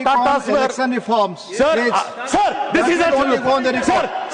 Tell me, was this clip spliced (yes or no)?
no